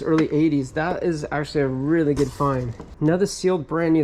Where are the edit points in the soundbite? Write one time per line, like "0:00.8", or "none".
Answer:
0:02.8